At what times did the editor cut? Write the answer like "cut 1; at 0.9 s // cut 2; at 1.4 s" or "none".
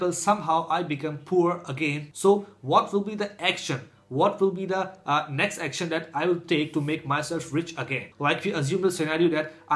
none